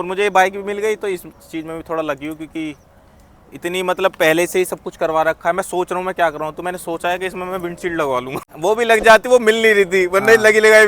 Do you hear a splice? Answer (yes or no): no